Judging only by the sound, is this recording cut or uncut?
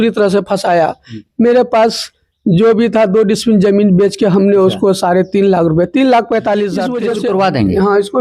cut